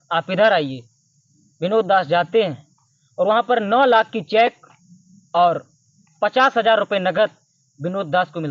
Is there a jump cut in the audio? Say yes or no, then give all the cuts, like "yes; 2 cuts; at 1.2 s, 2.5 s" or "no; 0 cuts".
no; 0 cuts